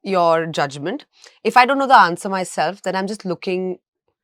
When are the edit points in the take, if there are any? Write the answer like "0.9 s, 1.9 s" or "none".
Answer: none